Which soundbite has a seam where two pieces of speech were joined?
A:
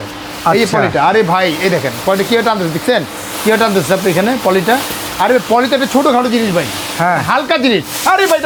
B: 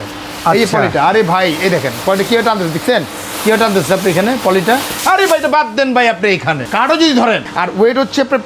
B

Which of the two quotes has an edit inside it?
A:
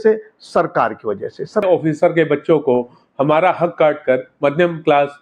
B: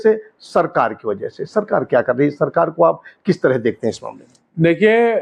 A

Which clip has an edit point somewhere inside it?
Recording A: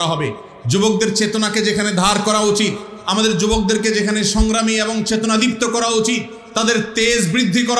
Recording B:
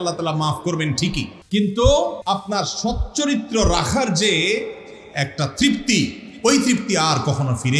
B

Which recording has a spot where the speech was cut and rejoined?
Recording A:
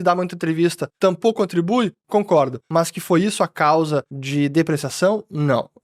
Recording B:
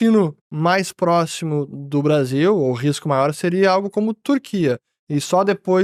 A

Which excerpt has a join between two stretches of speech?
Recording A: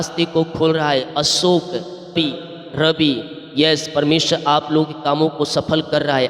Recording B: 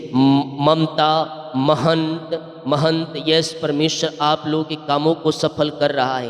A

